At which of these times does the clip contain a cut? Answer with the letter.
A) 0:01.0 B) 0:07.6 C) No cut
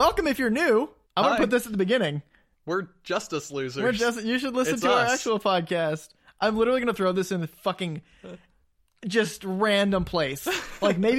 A